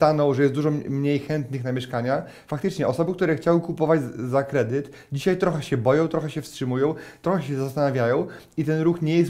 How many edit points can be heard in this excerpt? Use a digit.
0